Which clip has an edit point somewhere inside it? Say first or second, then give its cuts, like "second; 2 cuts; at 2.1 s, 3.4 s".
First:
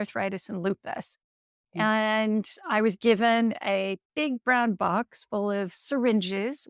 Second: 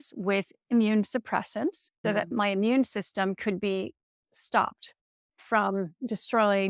second; 1 cut; at 1.9 s